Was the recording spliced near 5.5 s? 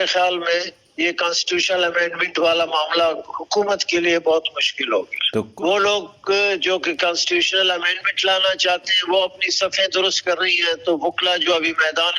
yes; 1 cut; at 5.5 s

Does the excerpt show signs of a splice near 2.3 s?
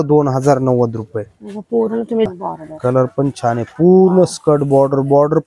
yes; 1 cut; at 2.3 s

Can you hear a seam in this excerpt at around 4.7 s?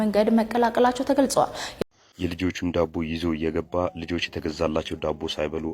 no; 1 cut; at 1.6 s

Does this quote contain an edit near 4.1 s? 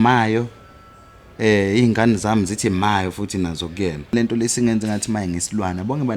yes; 1 cut; at 4.1 s

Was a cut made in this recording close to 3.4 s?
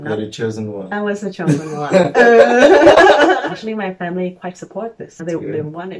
yes; 2 cuts; at 3.4 s, 5.1 s

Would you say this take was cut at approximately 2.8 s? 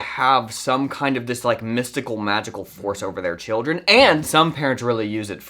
no; 1 cut; at 4.3 s

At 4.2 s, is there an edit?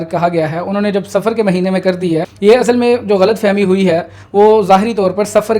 no; 1 cut; at 2.3 s

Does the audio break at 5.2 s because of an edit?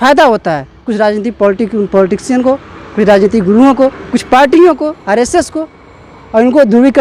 no; 0 cuts

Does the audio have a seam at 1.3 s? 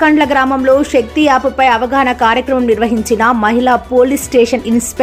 no; 0 cuts

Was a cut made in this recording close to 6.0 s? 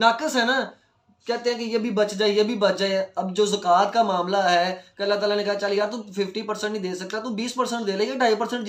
no; 0 cuts

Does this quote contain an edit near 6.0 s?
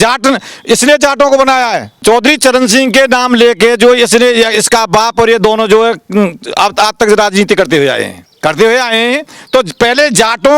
no; 2 cuts; at 2.0 s, 8.2 s

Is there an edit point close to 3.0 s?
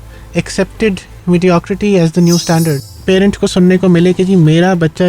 yes; 1 cut; at 3.0 s

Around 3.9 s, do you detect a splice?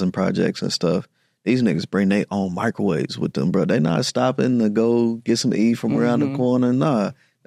no; 0 cuts

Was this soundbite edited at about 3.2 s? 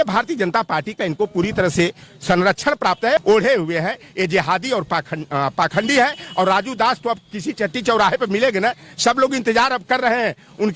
yes; 1 cut; at 3.2 s

